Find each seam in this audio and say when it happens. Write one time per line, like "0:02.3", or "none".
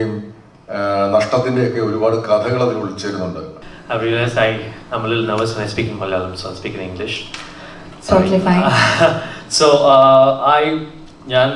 0:03.5